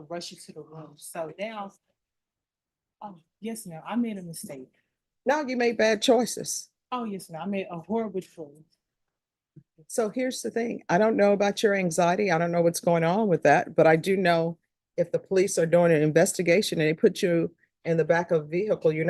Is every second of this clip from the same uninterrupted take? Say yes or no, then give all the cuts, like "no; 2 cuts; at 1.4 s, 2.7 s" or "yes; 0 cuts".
yes; 0 cuts